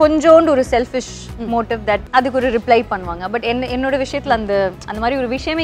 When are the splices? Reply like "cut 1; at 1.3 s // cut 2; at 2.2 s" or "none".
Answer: cut 1; at 2.0 s